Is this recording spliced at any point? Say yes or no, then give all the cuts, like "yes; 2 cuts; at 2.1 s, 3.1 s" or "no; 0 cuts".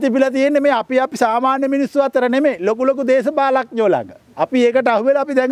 no; 0 cuts